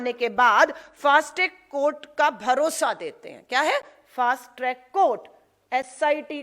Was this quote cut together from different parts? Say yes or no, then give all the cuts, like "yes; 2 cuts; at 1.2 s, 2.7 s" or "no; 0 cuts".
no; 0 cuts